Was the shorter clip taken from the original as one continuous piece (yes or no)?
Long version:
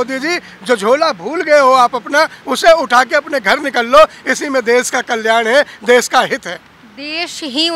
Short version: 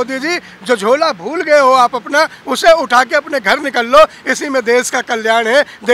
yes